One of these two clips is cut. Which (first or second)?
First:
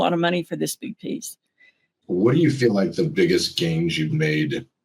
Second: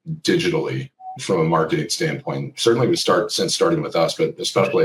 first